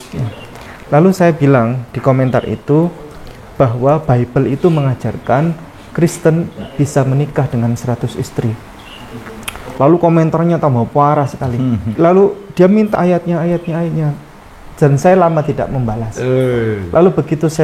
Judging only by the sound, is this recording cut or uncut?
cut